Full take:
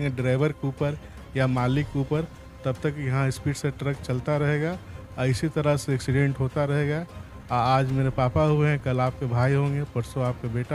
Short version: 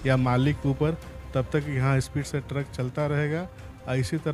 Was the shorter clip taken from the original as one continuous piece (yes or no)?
yes